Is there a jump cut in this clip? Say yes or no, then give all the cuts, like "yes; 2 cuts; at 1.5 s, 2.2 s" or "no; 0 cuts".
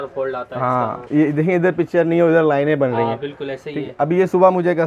no; 0 cuts